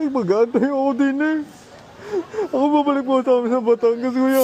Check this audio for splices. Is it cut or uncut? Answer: uncut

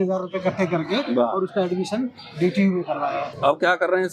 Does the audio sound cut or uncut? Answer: uncut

